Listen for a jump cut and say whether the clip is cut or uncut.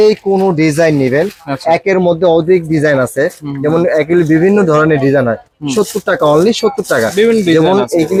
uncut